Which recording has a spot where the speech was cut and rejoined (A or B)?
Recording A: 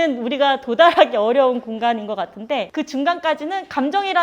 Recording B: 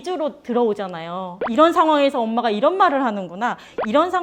A